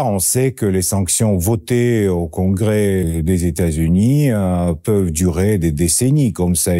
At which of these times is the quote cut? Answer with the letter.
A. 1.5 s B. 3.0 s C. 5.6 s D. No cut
B